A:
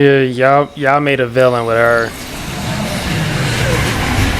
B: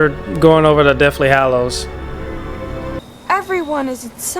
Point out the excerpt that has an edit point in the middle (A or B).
B